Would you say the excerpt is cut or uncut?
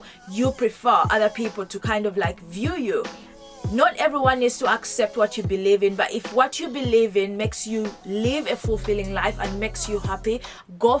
cut